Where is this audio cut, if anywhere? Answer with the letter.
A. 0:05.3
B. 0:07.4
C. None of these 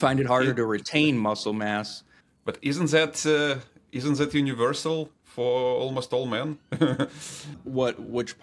B